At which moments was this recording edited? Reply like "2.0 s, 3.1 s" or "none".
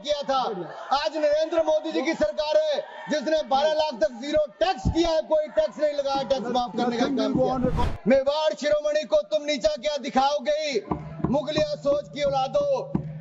7.8 s

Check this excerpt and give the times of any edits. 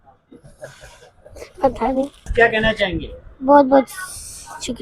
2.3 s

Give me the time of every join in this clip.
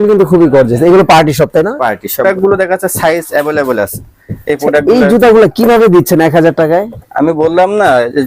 2.2 s

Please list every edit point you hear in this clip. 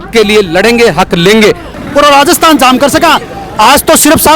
1.7 s

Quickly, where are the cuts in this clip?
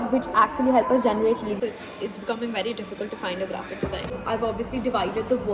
1.5 s, 4.1 s

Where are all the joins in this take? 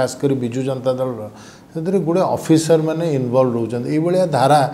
none

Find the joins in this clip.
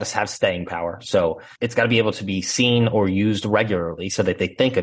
1.5 s

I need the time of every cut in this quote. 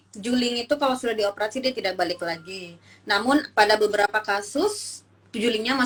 none

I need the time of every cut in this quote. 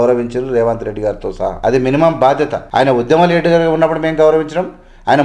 1.6 s, 2.6 s

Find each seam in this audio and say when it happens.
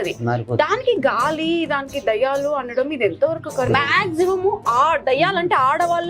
3.7 s

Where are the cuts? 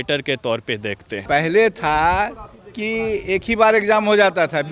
1.2 s

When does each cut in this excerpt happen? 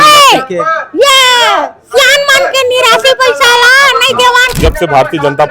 4.6 s

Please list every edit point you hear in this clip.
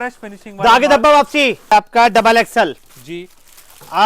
1.7 s

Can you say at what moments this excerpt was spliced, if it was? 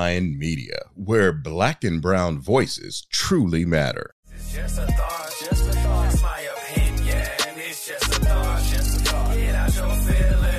4.1 s

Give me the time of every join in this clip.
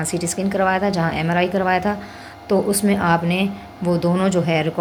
none

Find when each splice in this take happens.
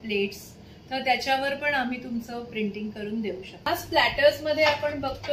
3.7 s

